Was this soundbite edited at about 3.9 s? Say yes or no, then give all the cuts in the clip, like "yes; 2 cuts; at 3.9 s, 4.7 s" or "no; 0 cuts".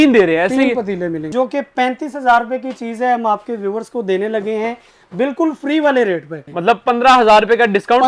no; 2 cuts; at 1.3 s, 6.3 s